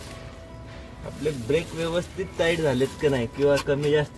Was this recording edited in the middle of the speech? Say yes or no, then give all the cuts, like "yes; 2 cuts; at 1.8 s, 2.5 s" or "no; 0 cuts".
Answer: no; 0 cuts